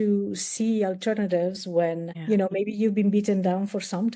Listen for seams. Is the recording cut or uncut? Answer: cut